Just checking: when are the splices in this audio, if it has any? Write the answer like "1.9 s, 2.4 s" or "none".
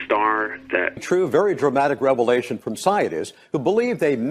none

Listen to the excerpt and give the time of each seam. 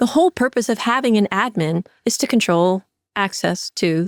none

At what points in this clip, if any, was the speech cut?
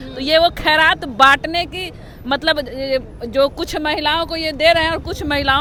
none

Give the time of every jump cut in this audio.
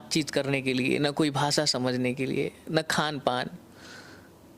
none

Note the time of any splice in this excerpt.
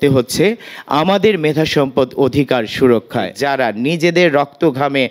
3.4 s

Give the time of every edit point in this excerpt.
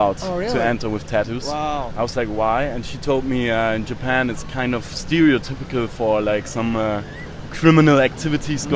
none

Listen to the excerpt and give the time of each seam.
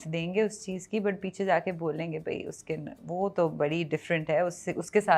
none

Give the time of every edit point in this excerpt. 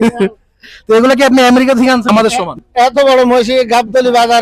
2.1 s

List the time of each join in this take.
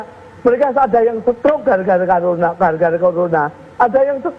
none

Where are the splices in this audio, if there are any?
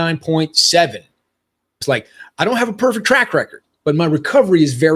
1.8 s, 3.2 s

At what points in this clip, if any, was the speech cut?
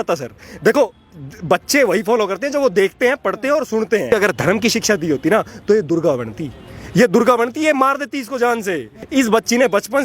4.1 s, 8.9 s

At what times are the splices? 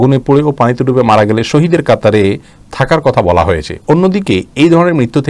none

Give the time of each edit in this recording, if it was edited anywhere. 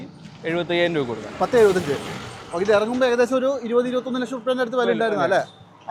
none

